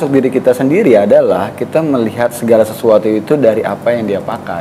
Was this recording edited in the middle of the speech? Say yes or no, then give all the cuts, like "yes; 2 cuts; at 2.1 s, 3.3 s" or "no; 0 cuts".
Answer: no; 0 cuts